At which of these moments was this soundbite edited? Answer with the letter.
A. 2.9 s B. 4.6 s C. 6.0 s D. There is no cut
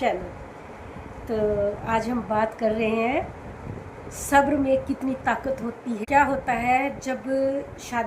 C